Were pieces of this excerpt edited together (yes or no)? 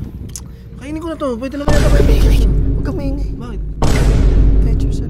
no